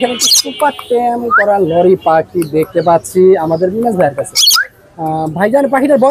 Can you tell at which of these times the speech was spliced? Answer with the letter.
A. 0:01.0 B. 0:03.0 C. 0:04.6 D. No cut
D